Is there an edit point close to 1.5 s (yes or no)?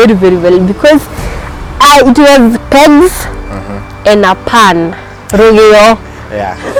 no